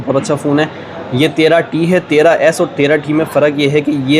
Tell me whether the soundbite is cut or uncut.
uncut